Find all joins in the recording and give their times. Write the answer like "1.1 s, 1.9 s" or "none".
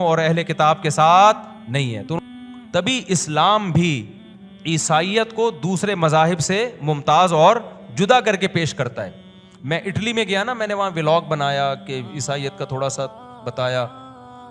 2.2 s